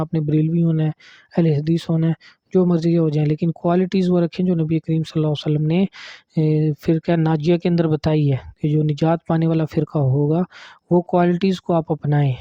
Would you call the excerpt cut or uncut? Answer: uncut